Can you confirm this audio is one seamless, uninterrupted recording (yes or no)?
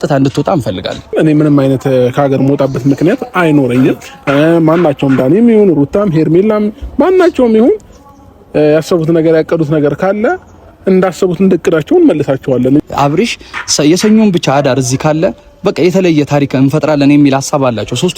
no